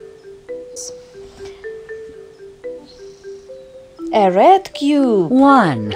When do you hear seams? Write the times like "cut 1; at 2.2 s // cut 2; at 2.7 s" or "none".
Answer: cut 1; at 0.8 s // cut 2; at 2.8 s